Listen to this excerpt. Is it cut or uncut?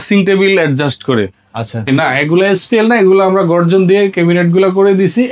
cut